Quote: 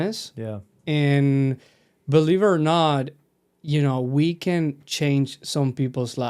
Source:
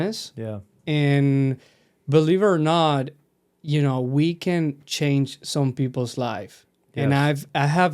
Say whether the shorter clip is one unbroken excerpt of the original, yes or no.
yes